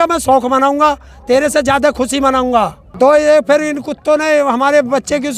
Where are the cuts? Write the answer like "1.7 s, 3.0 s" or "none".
2.7 s